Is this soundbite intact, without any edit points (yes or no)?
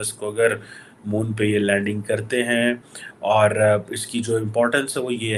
yes